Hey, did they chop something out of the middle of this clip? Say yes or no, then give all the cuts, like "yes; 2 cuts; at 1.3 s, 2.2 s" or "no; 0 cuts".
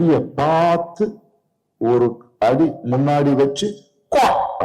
no; 0 cuts